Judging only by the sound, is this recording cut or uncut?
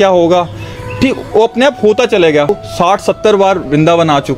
cut